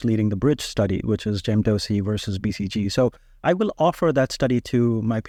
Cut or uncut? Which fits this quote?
uncut